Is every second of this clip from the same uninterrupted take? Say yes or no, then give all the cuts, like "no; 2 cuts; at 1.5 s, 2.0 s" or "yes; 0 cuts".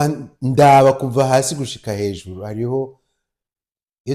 yes; 0 cuts